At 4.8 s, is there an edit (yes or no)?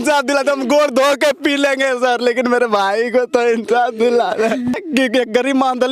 yes